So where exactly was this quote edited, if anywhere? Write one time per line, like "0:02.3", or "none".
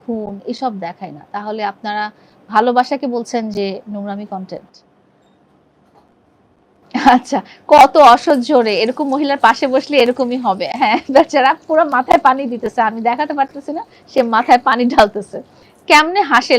none